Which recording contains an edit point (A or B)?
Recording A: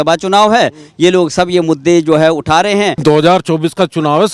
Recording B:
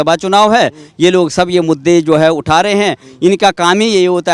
A